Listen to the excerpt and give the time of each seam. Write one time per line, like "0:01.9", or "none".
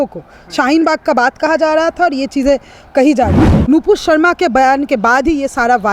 0:03.5